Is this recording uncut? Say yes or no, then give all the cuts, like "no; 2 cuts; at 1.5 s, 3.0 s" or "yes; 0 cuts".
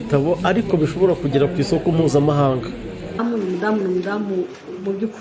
no; 1 cut; at 3.2 s